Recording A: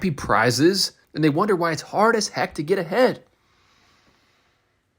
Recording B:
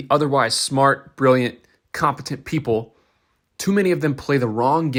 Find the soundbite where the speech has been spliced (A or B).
A